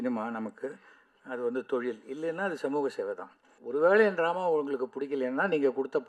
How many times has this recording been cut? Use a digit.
1